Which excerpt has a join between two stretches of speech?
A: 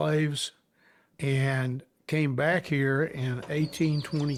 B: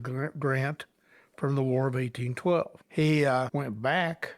B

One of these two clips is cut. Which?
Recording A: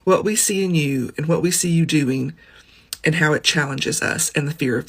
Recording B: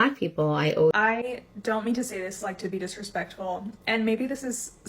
B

